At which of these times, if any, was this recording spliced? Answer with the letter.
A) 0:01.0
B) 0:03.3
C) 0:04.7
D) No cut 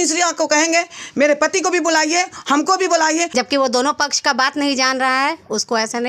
B